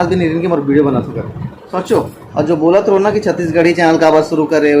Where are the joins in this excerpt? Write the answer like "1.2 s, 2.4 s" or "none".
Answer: 2.2 s